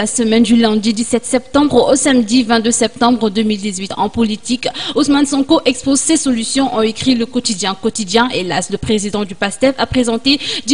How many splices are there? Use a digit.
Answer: 0